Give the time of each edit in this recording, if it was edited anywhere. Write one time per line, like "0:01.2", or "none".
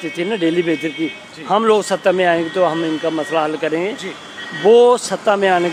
none